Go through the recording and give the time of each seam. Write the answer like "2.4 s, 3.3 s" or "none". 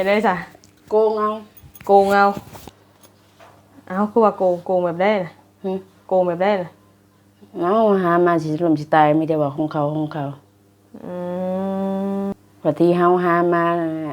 12.3 s